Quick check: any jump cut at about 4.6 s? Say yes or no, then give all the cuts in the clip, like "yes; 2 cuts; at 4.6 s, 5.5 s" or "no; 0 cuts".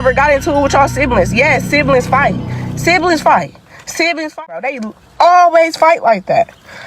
yes; 1 cut; at 4.6 s